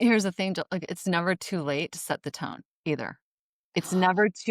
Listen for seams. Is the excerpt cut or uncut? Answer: uncut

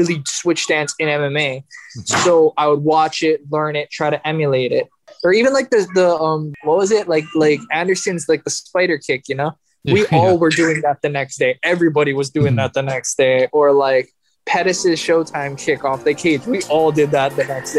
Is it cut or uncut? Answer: cut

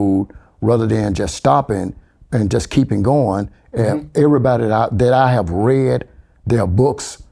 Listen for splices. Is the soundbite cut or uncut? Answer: uncut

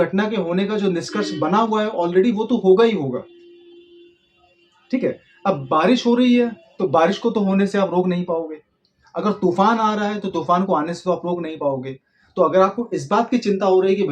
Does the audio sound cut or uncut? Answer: uncut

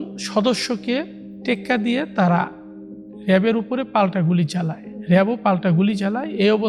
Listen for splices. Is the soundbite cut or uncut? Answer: cut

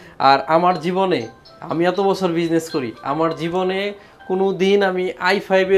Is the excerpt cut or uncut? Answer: uncut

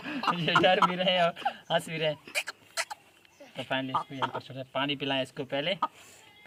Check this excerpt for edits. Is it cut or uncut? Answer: uncut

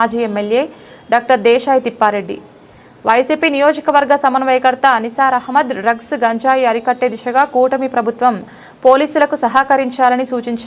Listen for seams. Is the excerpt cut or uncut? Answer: uncut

